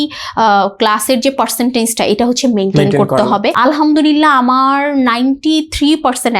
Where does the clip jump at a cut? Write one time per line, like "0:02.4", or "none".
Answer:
0:03.5